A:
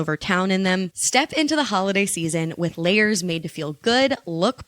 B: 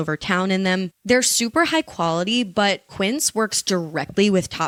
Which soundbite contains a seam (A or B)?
A